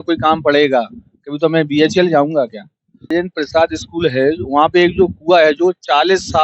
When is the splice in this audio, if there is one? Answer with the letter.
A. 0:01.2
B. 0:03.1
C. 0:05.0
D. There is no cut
B